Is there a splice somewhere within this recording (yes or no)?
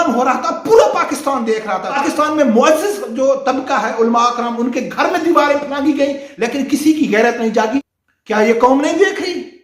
yes